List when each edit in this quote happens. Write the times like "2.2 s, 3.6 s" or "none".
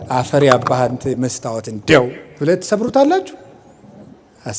none